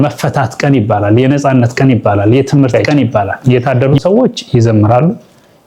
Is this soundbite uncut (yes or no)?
no